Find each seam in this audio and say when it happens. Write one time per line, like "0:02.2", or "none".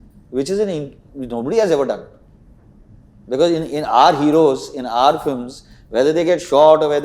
none